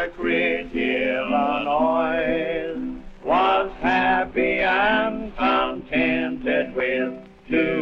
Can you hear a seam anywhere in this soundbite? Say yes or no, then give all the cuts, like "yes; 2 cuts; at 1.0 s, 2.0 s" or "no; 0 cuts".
no; 0 cuts